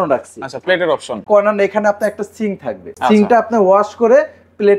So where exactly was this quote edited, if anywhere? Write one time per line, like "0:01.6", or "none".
0:01.2
0:02.9